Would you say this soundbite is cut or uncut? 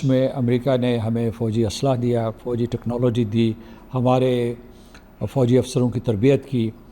uncut